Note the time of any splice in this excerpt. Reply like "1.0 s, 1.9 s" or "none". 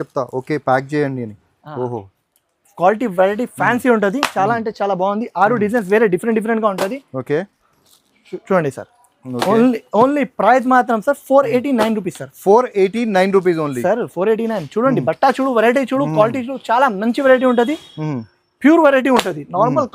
none